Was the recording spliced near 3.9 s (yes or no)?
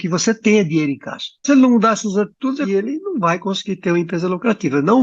no